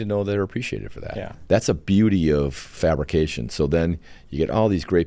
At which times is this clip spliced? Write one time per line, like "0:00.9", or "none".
0:01.3
0:02.7